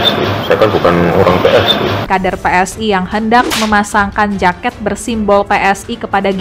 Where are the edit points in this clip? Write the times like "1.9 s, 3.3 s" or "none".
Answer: 2.1 s